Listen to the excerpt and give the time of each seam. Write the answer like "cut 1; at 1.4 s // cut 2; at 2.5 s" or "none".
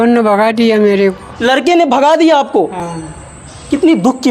none